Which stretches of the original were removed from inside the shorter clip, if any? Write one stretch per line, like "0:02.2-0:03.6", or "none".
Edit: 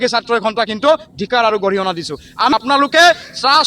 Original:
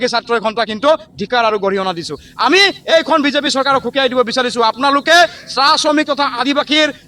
0:02.5-0:04.7

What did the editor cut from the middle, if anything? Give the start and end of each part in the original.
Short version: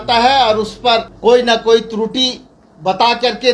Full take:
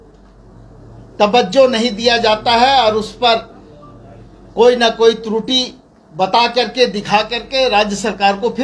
0:03.5-0:04.4

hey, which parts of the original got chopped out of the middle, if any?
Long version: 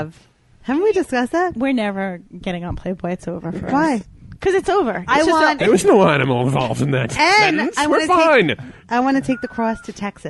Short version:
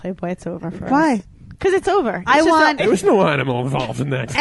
none

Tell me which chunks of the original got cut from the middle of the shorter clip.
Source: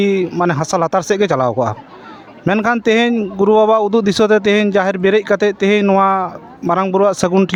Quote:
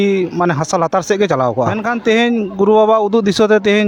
0:01.8-0:02.6

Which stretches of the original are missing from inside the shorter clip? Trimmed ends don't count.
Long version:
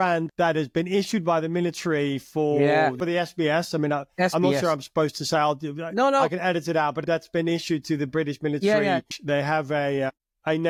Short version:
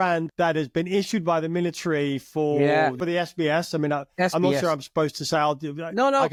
none

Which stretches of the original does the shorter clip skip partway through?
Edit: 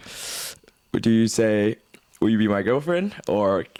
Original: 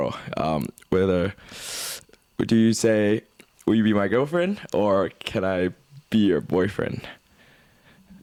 none

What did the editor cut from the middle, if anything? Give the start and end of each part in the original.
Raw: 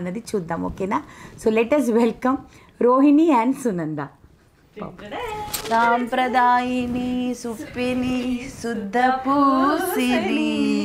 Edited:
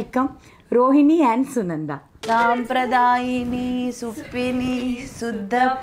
0:04.2-0:05.5

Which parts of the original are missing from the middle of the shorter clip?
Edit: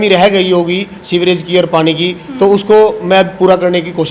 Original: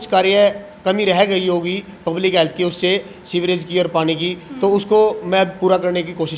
0:01.9-0:03.2

